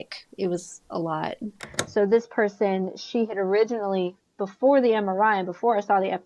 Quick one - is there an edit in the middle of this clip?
yes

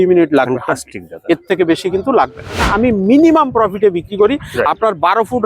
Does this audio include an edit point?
yes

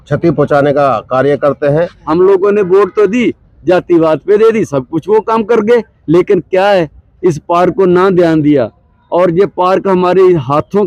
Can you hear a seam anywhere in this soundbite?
yes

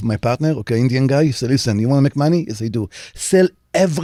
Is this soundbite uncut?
yes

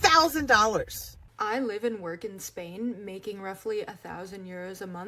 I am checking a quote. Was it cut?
yes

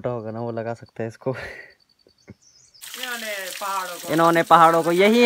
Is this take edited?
yes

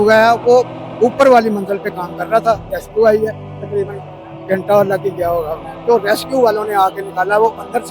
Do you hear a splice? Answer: yes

